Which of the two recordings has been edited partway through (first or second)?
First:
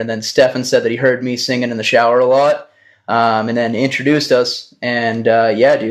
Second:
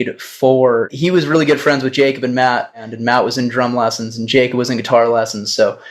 second